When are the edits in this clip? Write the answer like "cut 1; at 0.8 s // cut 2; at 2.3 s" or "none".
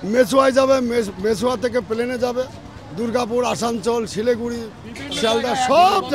none